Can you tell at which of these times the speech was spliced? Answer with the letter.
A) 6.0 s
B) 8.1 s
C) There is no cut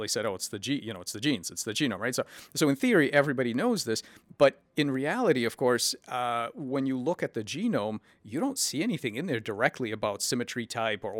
B